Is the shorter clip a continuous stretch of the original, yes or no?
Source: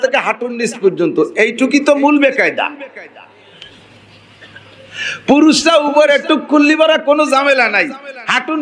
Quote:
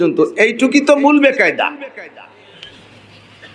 yes